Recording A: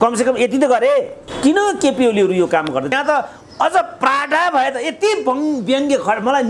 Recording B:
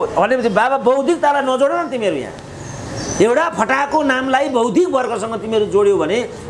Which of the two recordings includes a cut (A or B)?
A